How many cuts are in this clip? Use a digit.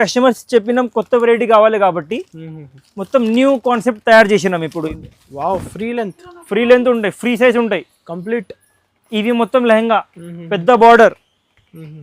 1